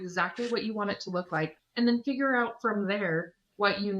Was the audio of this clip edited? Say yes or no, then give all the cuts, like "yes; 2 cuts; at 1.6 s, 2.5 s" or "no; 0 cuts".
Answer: yes; 1 cut; at 1.6 s